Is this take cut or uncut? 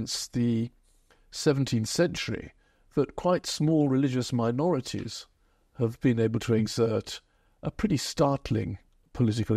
uncut